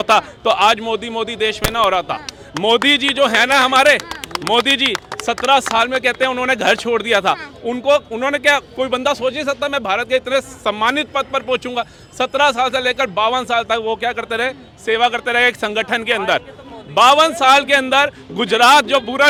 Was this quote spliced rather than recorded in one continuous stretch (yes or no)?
no